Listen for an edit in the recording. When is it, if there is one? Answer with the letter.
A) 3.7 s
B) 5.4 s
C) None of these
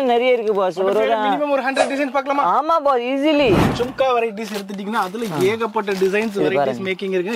A